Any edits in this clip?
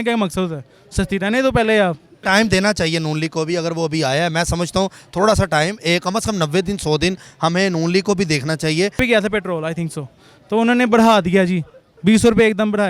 yes; 2 cuts; at 2.2 s, 9.0 s

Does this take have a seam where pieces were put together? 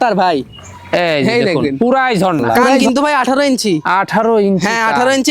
yes; 1 cut; at 2.5 s

